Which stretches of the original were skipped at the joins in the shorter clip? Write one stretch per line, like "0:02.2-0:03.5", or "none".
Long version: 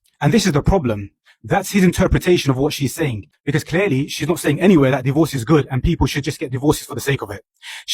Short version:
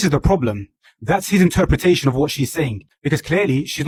none